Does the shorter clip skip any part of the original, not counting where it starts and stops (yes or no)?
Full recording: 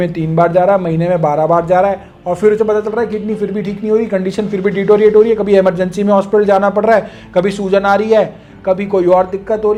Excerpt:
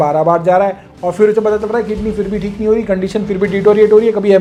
no